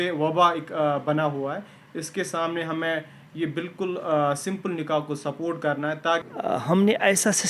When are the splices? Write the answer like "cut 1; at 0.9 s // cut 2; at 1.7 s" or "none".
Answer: cut 1; at 6.3 s